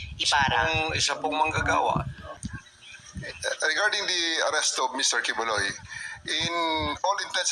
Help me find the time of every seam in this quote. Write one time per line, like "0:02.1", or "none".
0:02.4

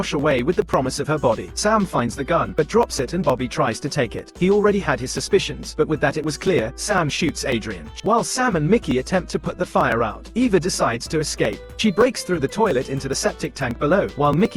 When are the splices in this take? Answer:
0:01.5
0:04.3
0:07.9
0:11.7

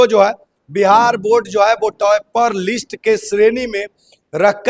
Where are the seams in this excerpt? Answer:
none

